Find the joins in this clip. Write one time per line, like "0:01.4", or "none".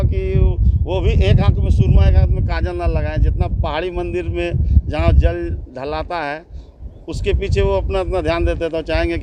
none